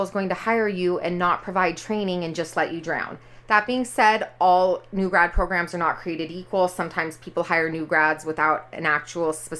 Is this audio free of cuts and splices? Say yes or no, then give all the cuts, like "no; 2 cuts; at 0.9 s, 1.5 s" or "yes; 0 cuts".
yes; 0 cuts